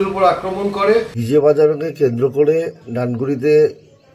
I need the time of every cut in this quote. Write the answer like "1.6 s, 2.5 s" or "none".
1.1 s